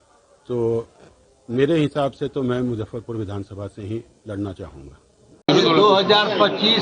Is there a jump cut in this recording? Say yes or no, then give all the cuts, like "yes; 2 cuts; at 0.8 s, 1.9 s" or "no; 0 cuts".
yes; 1 cut; at 5.5 s